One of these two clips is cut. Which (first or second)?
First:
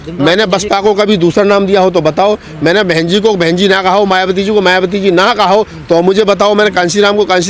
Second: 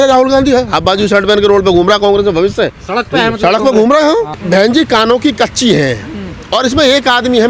second